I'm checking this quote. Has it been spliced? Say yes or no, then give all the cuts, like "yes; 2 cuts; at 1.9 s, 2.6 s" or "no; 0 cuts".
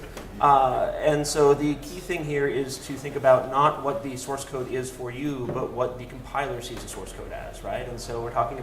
yes; 1 cut; at 4.1 s